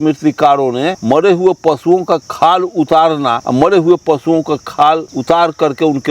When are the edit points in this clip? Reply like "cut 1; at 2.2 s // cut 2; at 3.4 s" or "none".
cut 1; at 1.0 s // cut 2; at 2.3 s // cut 3; at 3.4 s // cut 4; at 5.1 s